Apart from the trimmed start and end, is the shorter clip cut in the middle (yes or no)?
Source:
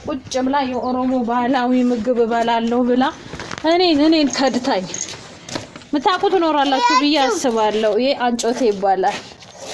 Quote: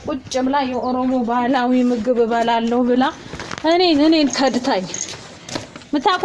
no